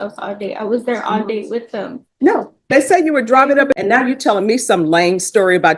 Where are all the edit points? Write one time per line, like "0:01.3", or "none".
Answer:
0:03.8